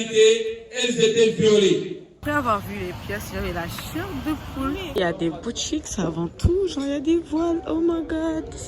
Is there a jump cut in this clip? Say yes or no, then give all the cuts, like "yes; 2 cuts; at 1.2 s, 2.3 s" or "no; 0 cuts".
yes; 2 cuts; at 2.2 s, 4.9 s